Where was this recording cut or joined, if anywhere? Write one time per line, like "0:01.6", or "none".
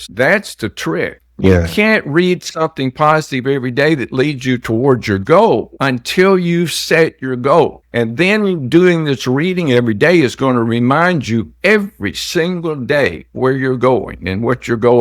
none

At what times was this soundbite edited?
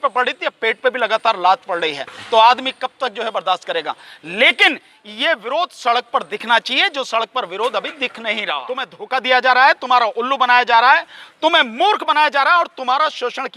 0:09.0

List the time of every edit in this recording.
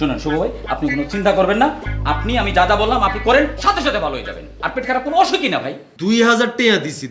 0:05.8

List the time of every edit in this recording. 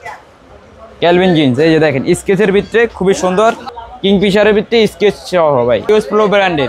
0:03.7
0:05.9

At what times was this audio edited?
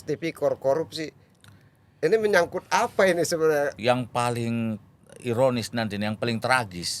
0:03.8

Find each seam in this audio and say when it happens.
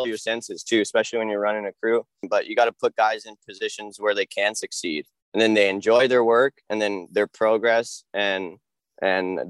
0:02.2

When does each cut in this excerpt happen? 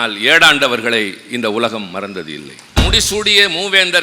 0:02.8

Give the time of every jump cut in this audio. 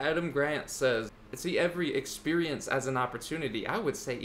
0:01.2

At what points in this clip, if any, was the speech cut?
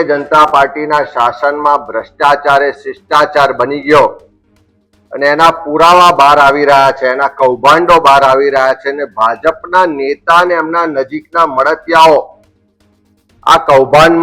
none

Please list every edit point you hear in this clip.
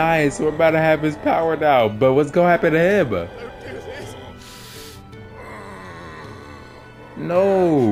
none

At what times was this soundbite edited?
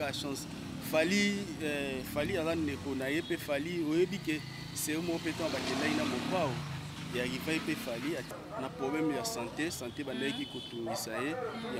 0:08.4

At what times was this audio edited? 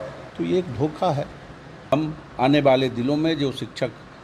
0:01.9

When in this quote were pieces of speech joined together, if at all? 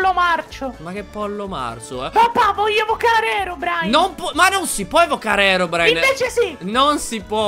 none

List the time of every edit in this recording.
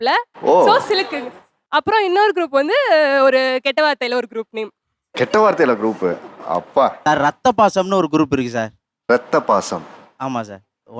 0:07.0

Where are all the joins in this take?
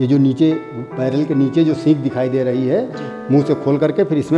none

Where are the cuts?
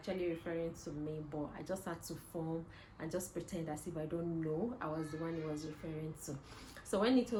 none

